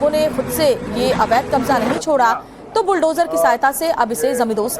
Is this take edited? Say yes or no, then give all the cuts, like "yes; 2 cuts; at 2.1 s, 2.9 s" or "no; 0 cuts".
yes; 1 cut; at 3.6 s